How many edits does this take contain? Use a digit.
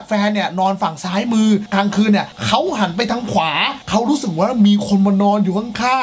0